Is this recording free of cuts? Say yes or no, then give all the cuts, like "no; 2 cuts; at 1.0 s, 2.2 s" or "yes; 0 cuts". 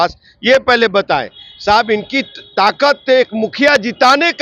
yes; 0 cuts